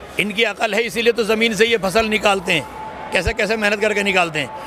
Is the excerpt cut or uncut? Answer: uncut